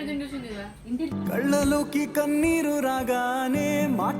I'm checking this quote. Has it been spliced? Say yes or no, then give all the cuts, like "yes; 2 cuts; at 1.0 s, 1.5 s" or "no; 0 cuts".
yes; 1 cut; at 1.1 s